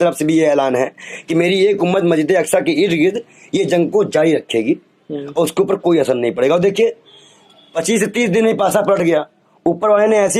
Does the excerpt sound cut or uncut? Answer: uncut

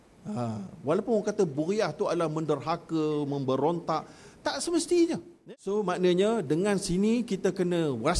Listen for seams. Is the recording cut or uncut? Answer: cut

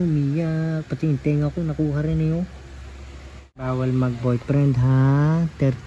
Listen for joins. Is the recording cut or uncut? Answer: cut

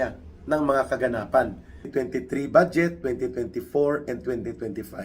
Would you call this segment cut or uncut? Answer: cut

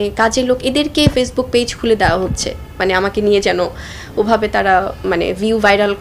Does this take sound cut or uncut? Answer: uncut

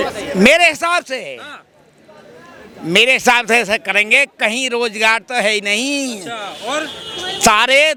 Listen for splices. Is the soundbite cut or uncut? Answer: uncut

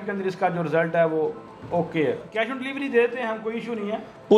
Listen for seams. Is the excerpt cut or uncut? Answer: cut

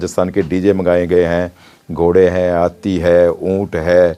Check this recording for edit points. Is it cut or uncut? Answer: uncut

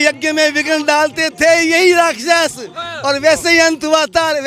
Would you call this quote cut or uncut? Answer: uncut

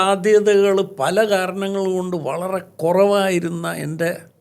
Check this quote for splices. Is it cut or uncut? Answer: uncut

